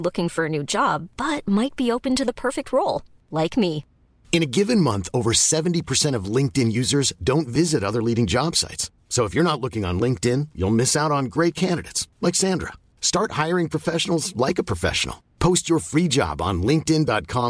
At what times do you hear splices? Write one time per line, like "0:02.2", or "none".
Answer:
none